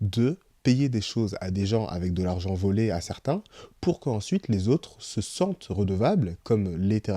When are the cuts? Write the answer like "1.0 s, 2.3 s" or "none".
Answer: none